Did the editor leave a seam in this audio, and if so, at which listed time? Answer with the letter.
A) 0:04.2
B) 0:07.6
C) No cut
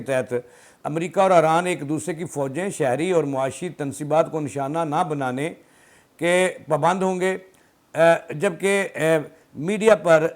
C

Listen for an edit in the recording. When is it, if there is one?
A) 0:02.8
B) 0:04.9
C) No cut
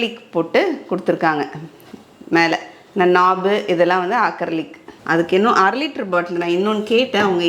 B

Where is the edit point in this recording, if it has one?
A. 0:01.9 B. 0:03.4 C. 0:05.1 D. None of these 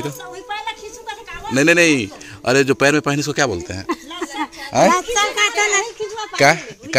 D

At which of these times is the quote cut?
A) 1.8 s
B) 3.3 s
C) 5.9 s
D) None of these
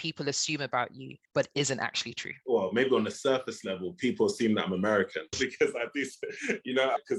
D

